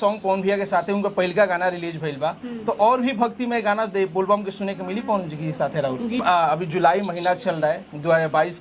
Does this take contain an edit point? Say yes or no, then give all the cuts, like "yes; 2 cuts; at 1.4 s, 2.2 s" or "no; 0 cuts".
yes; 1 cut; at 6.2 s